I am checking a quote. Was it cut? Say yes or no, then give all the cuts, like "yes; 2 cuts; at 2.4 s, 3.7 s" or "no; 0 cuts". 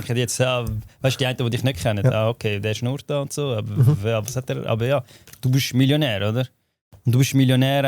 no; 0 cuts